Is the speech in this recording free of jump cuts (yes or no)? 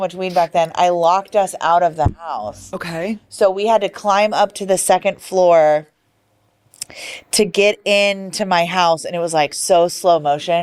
yes